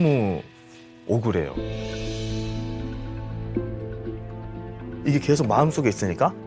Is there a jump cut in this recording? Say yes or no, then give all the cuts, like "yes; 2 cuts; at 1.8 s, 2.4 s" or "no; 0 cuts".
no; 0 cuts